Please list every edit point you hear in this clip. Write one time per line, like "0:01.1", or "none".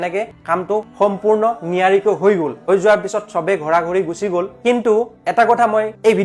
none

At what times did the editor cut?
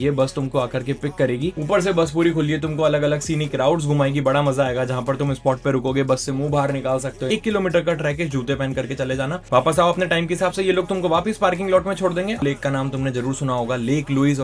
0:07.3
0:12.4

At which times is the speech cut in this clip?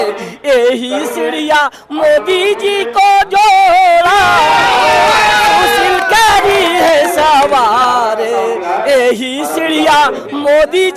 none

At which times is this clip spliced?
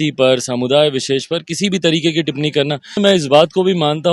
0:03.0

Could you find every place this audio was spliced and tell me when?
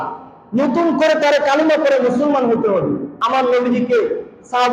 0:03.1

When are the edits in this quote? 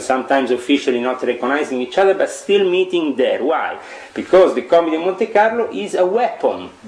none

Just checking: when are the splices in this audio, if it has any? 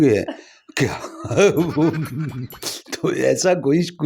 none

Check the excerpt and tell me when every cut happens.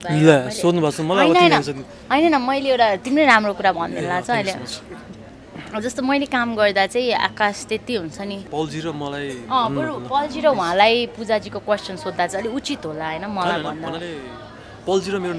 0:08.4

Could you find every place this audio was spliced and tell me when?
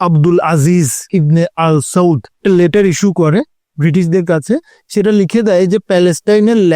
0:01.0
0:02.3
0:04.7

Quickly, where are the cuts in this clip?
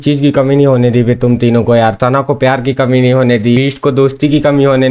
0:02.0
0:03.6

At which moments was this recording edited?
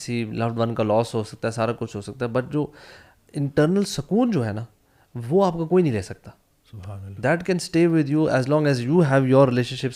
none

